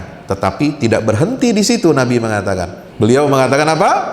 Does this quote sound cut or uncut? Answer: cut